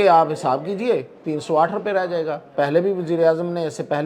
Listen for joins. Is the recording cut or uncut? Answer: cut